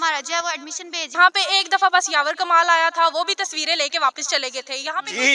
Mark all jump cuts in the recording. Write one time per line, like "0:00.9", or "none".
0:01.2